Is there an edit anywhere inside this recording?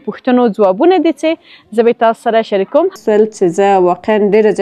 yes; 1 cut; at 3.0 s

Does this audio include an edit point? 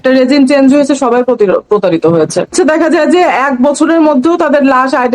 yes; 1 cut; at 2.5 s

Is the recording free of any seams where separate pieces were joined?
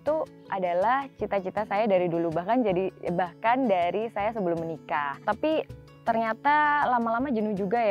no; 2 cuts; at 5.2 s, 5.8 s

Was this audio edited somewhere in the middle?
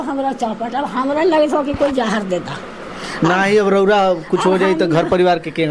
no; 0 cuts

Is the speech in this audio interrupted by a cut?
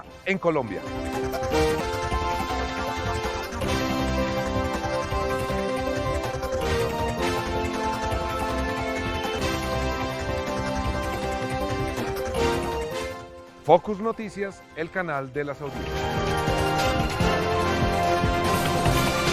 yes; 1 cut; at 1.8 s

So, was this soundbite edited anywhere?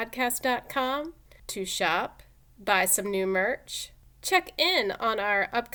no; 0 cuts

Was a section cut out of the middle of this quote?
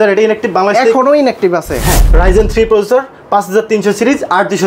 yes; 1 cut; at 1.9 s

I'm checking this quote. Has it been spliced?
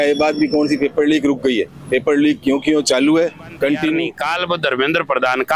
yes; 1 cut; at 4.2 s

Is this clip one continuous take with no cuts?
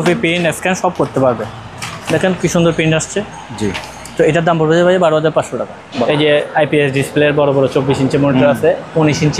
no; 1 cut; at 5.8 s

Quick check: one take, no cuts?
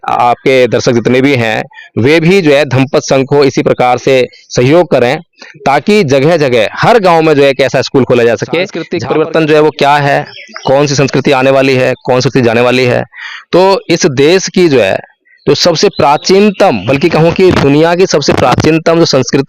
no; 1 cut; at 8.9 s

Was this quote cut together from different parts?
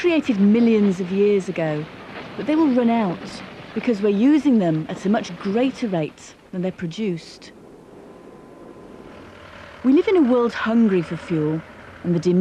no; 0 cuts

